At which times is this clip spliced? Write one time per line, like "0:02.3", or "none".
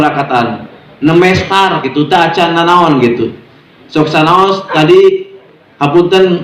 none